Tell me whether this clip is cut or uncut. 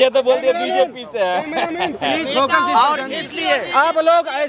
uncut